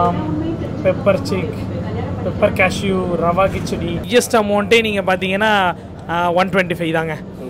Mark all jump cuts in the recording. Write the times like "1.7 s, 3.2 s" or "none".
4.0 s